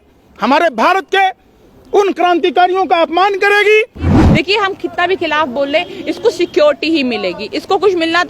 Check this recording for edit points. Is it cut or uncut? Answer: cut